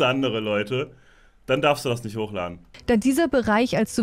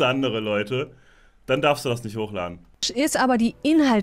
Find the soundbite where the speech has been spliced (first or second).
second